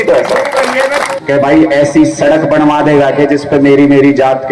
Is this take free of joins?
no; 1 cut; at 1.1 s

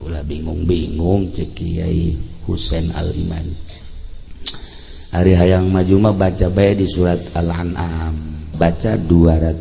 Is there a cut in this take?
yes; 1 cut; at 8.4 s

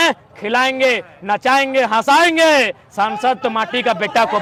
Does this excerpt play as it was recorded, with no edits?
yes; 0 cuts

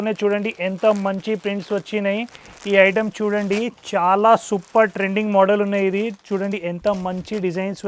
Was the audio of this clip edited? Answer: no; 0 cuts

